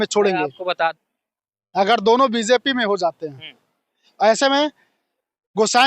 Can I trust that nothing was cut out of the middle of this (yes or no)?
no